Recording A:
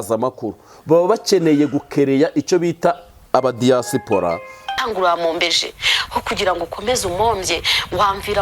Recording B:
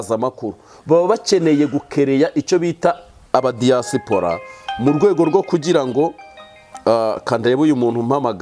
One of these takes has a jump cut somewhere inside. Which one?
A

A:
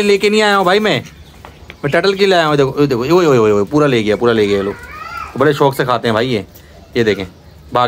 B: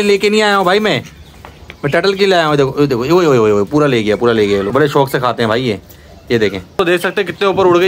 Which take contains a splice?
B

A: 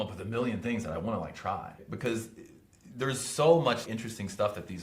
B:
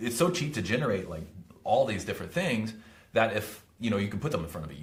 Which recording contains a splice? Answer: A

